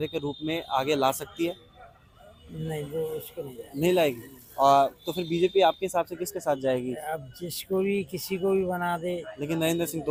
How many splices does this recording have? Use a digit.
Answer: 0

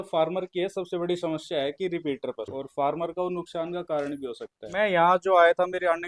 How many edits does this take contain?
2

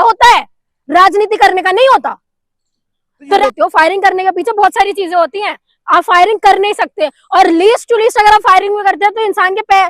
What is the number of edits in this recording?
1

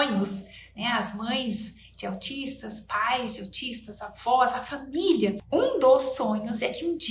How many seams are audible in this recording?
1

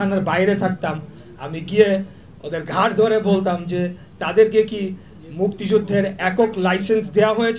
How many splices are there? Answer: 0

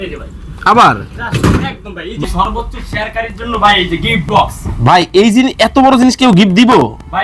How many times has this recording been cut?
1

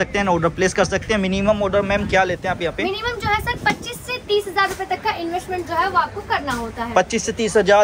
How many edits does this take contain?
0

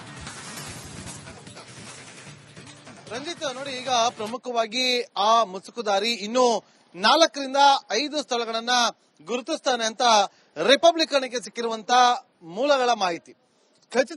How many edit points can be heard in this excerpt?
1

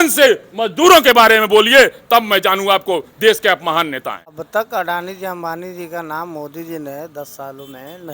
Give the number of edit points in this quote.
1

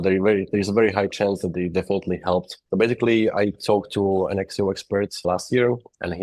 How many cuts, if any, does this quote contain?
1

